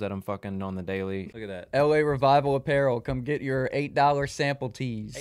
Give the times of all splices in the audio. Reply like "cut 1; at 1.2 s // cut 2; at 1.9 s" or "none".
cut 1; at 1.3 s